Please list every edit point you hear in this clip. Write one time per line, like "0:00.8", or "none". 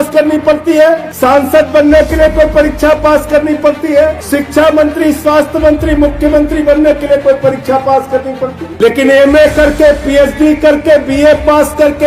0:01.1
0:04.2
0:08.6